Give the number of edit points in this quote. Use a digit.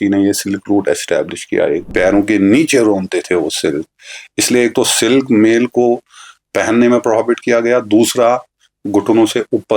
1